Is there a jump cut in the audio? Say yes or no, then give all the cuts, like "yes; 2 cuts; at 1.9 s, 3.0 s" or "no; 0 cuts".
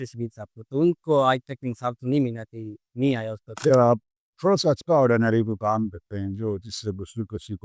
yes; 1 cut; at 3.7 s